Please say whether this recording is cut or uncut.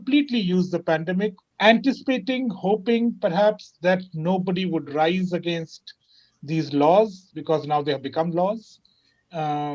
cut